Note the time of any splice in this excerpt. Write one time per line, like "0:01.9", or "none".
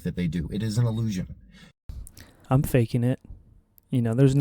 0:02.4